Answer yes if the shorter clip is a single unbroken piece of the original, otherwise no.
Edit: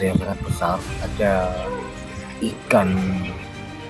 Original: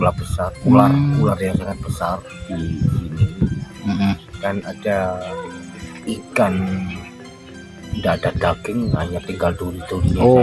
no